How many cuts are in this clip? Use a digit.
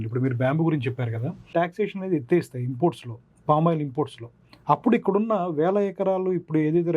1